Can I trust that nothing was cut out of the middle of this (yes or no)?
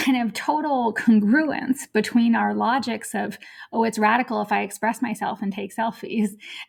yes